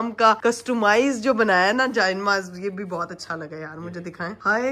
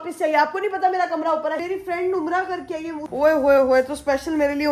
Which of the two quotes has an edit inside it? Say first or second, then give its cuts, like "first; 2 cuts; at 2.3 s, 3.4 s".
second; 2 cuts; at 1.6 s, 3.1 s